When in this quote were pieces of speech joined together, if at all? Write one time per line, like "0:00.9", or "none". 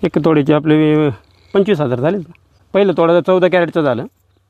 0:02.6